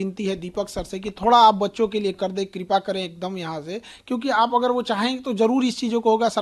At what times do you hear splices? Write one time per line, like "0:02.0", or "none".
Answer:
none